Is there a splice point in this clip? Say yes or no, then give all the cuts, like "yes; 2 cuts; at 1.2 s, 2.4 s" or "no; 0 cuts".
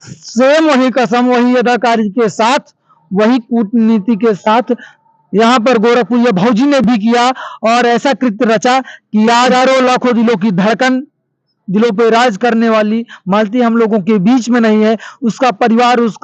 yes; 1 cut; at 9.5 s